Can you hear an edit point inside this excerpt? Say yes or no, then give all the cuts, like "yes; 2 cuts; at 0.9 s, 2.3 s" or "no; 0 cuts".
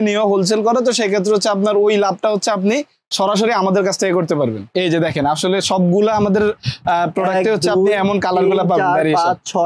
yes; 1 cut; at 4.7 s